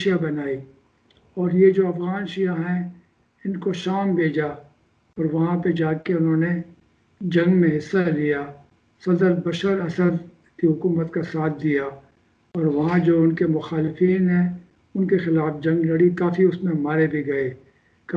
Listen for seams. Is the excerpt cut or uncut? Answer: uncut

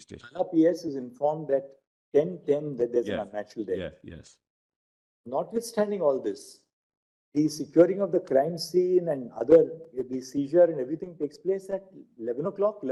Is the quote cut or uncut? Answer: uncut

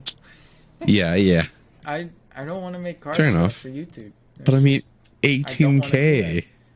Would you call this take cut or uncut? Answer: cut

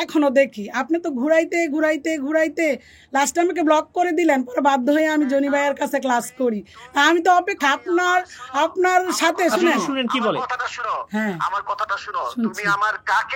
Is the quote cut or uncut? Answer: uncut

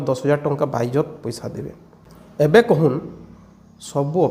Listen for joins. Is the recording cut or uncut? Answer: cut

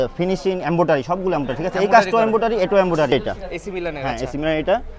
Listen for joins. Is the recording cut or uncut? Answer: cut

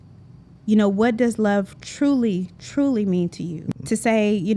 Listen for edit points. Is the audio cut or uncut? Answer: cut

